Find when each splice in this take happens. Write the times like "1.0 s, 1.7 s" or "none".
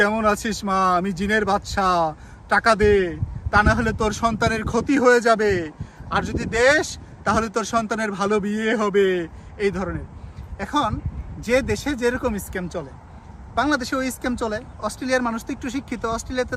none